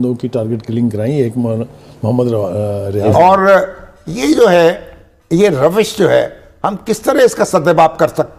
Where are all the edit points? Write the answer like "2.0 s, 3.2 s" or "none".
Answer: 3.0 s